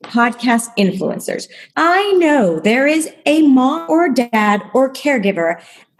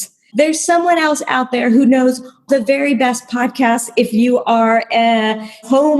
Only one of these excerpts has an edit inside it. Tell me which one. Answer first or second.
second